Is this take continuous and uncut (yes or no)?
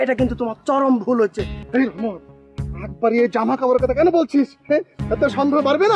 no